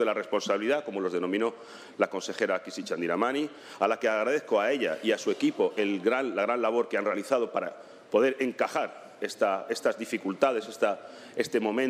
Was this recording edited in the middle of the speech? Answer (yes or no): no